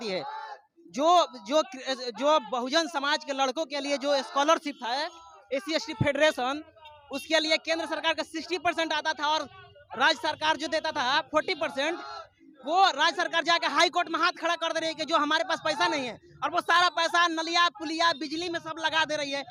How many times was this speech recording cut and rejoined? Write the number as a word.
zero